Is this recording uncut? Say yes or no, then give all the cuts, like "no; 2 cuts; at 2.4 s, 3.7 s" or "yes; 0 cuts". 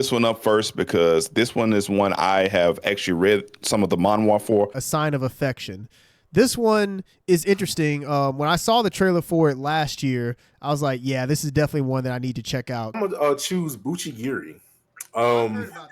no; 2 cuts; at 4.8 s, 13.0 s